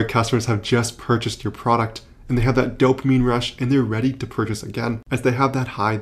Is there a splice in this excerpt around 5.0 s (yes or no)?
yes